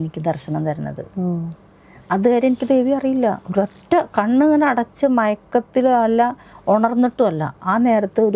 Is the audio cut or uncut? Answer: uncut